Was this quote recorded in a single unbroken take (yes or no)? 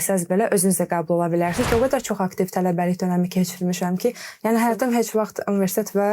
no